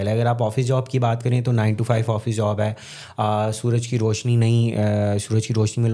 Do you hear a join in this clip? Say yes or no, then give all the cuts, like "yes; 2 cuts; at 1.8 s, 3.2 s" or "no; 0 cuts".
no; 0 cuts